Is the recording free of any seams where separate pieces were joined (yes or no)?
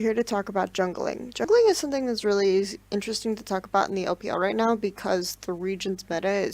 yes